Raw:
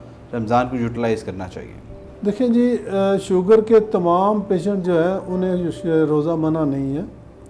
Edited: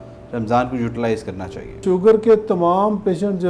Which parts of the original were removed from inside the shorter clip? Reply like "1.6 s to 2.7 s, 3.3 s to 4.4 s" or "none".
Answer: 1.8 s to 3.2 s